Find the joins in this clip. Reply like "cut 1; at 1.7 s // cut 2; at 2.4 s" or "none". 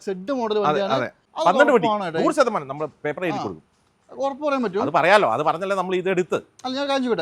cut 1; at 1.2 s

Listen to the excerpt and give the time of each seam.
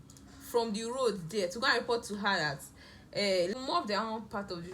cut 1; at 3.5 s

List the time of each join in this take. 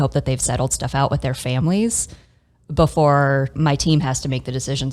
cut 1; at 3.5 s

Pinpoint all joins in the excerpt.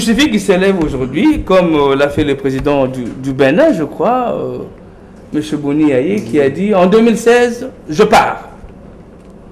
none

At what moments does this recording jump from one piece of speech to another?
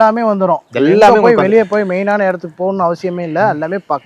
none

